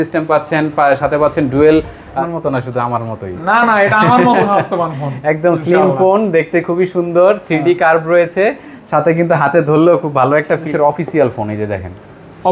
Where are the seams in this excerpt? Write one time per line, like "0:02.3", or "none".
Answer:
0:02.1
0:10.7